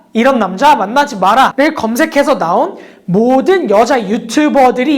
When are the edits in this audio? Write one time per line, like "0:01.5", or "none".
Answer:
0:01.5